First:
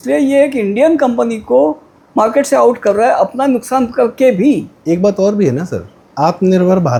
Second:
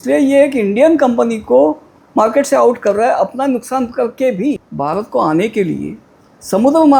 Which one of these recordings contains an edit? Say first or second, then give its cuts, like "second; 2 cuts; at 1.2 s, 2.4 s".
second; 1 cut; at 4.7 s